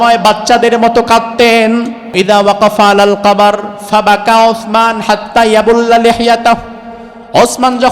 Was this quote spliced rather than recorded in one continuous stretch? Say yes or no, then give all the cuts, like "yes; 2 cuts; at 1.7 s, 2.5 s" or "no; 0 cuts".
yes; 1 cut; at 2.1 s